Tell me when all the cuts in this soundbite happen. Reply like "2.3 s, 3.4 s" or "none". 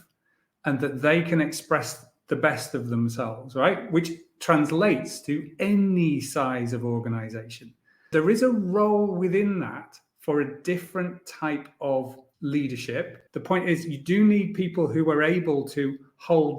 8.0 s, 12.2 s, 13.2 s